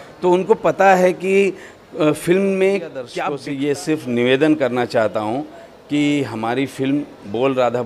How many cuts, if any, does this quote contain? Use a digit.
1